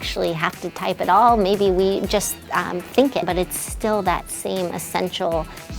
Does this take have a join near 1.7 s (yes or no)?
no